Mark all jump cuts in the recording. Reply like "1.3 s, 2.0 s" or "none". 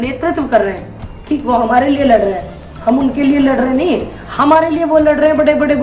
none